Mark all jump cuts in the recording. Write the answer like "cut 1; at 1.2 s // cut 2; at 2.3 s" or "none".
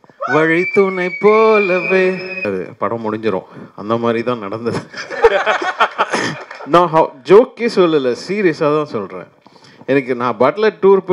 cut 1; at 2.4 s